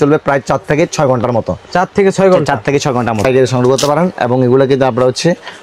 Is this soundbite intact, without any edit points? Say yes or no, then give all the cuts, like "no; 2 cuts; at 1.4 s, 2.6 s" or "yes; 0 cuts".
no; 1 cut; at 3.2 s